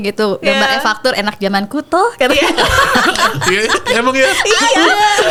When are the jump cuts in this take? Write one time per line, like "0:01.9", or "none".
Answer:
none

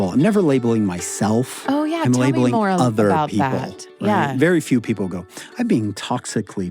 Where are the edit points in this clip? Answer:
0:01.5

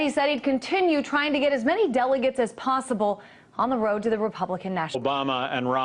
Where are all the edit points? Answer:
none

